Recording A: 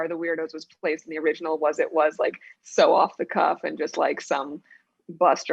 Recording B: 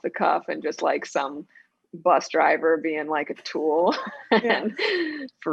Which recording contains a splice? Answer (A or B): B